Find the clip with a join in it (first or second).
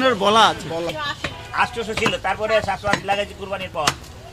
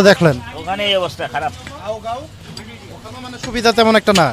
first